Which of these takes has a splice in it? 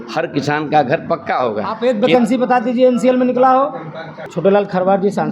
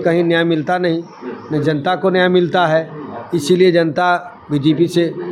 first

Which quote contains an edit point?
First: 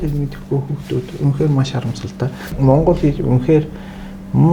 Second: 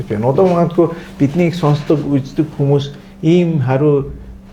first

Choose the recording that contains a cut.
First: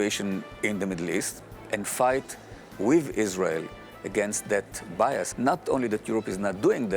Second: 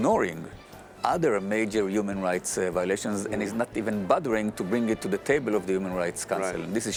first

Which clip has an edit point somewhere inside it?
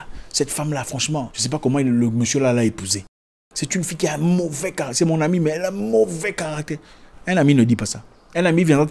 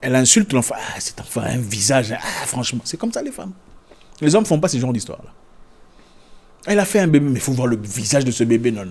first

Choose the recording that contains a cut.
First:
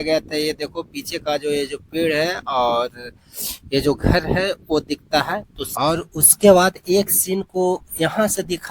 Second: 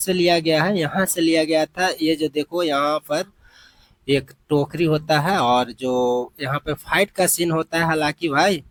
first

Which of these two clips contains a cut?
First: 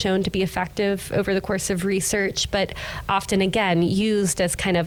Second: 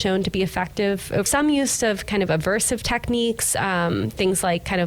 second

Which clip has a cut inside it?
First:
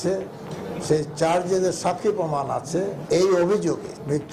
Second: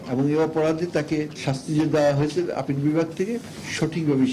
first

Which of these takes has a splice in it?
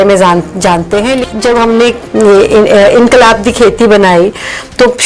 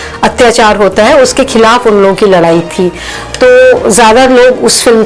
first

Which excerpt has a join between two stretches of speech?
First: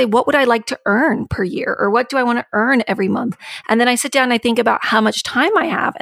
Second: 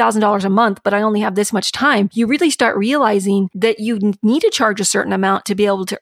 second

